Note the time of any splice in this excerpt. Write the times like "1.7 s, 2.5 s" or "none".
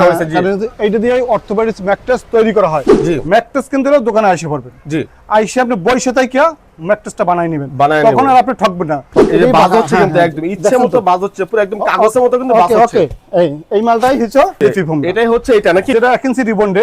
2.9 s, 9.2 s, 15.9 s